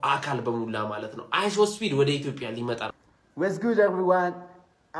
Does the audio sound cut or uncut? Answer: cut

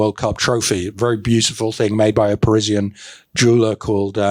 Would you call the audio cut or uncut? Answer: uncut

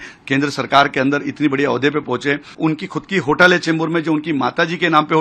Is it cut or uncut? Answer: cut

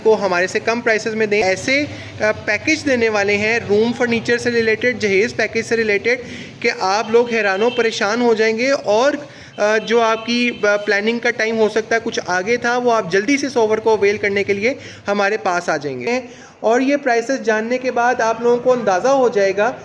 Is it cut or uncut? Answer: cut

